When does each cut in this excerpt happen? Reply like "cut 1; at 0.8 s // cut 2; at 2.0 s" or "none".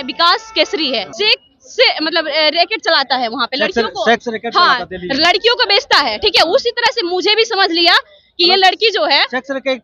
cut 1; at 1.1 s